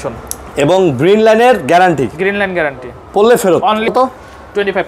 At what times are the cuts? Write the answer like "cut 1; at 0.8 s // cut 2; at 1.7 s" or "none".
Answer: cut 1; at 3.9 s